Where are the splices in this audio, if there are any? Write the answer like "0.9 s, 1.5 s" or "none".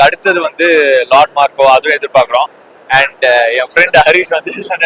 none